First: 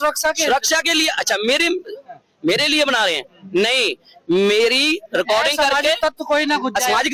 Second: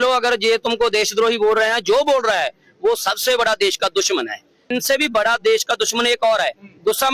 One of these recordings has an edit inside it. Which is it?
second; 1 cut; at 4.6 s

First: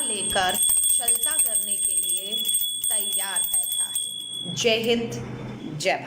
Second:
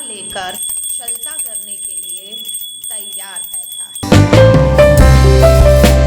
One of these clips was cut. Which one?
second; 1 cut; at 3.9 s

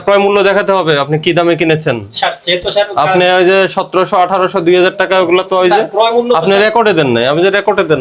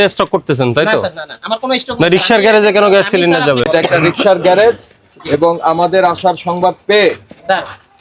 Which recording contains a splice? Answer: second; 1 cut; at 3.7 s

